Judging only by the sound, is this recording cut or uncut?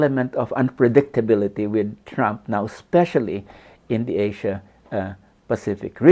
uncut